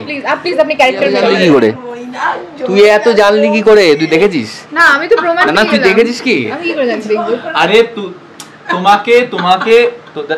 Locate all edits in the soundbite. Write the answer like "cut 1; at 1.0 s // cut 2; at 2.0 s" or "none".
cut 1; at 1.3 s